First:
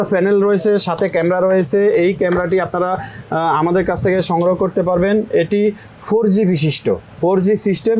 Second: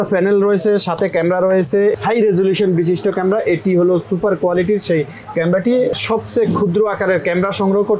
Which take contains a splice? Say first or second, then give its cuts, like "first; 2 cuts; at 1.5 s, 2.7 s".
second; 2 cuts; at 1.9 s, 6.0 s